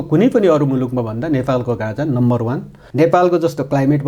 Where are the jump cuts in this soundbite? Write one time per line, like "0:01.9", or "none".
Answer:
0:02.8